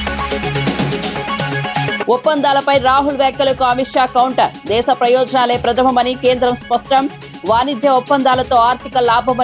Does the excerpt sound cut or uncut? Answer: uncut